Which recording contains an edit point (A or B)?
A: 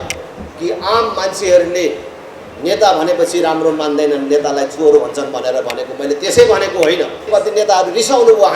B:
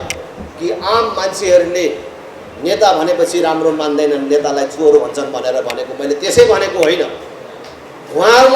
A